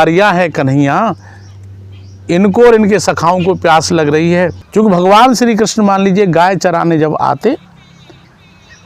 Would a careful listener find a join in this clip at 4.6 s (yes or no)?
yes